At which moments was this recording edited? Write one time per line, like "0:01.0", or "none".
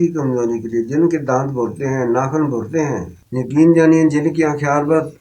0:03.2